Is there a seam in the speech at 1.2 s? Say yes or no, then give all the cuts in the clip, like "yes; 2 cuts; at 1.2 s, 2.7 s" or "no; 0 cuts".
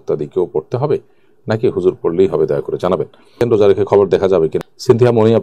no; 2 cuts; at 3.2 s, 4.6 s